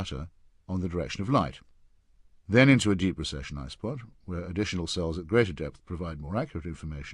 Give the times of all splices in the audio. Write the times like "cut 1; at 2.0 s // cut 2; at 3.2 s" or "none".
none

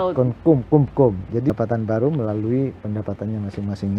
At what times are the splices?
cut 1; at 1.5 s

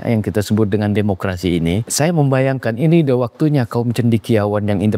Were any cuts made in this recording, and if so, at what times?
cut 1; at 1.9 s

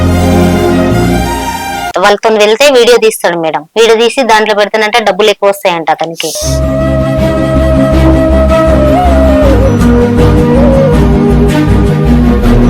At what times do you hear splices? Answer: cut 1; at 1.9 s

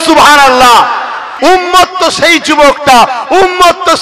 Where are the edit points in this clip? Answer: cut 1; at 1.2 s

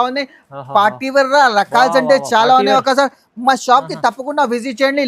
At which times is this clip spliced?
none

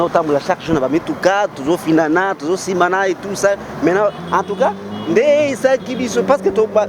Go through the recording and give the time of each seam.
none

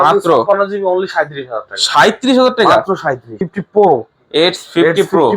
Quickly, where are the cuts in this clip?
cut 1; at 3.3 s

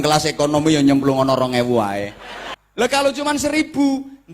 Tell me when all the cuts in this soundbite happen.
cut 1; at 2.6 s

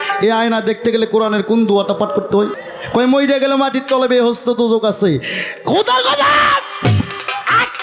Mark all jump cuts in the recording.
cut 1; at 2.6 s

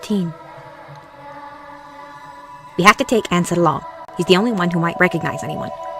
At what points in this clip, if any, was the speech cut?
cut 1; at 4.4 s

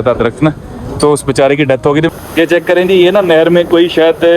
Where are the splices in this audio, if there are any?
cut 1; at 2.1 s

